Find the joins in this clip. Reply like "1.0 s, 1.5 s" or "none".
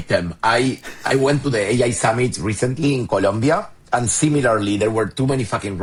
none